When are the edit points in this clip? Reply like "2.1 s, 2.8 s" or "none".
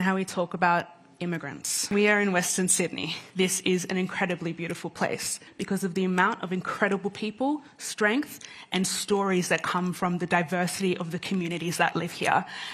1.8 s, 3.1 s, 5.5 s